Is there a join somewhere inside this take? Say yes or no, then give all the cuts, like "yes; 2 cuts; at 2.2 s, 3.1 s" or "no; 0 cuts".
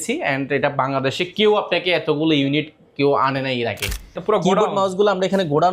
yes; 1 cut; at 4.2 s